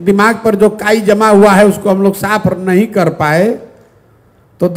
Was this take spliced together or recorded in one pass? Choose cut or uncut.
uncut